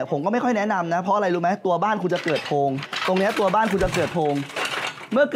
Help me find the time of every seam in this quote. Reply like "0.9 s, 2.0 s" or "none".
2.9 s